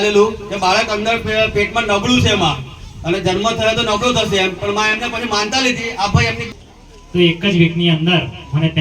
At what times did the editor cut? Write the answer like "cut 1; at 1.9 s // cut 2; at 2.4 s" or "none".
cut 1; at 6.5 s